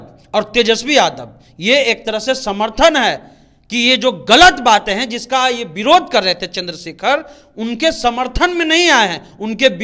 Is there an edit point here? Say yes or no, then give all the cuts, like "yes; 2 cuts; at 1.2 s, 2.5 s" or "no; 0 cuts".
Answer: no; 0 cuts